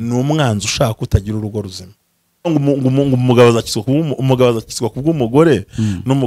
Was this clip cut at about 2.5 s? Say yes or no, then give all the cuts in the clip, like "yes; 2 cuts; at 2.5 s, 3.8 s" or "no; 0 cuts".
yes; 1 cut; at 2.5 s